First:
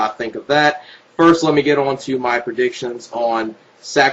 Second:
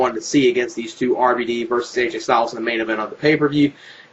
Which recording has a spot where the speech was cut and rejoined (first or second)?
first